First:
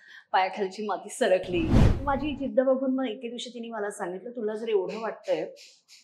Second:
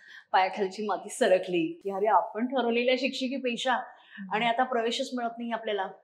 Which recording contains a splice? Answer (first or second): first